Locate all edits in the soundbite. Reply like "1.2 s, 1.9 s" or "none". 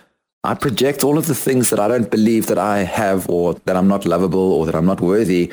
3.6 s